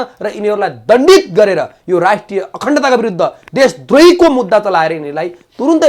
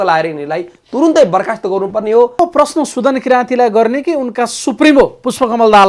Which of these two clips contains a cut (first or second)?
second